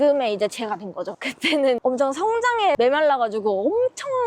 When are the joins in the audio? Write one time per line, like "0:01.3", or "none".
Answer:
0:01.6
0:02.8

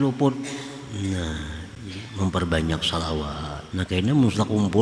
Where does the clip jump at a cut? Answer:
0:03.5

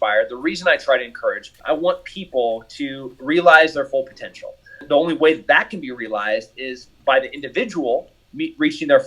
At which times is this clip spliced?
0:01.5
0:04.8

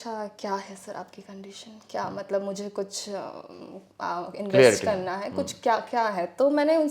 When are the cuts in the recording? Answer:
none

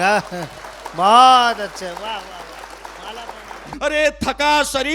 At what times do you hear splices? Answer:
0:03.6

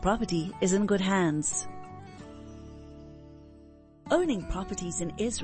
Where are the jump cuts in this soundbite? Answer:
0:01.5
0:03.9

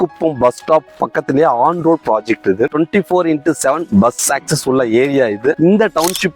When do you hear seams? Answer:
0:02.7
0:05.6

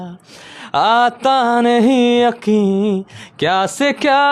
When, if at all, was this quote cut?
none

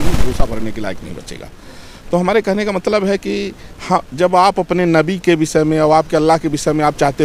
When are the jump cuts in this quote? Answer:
none

